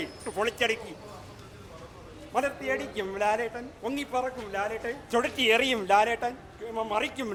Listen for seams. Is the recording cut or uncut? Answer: uncut